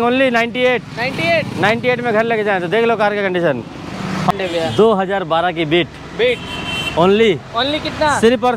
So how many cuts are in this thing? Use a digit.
1